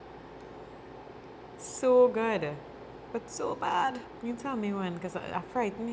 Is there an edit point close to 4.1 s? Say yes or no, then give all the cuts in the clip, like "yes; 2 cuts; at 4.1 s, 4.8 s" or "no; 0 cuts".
yes; 1 cut; at 4.1 s